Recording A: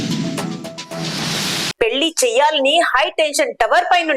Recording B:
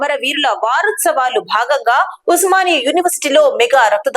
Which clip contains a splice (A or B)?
A